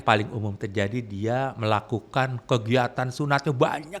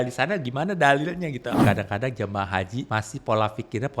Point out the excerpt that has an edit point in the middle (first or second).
second